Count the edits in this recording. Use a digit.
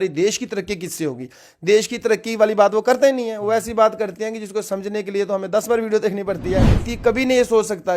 1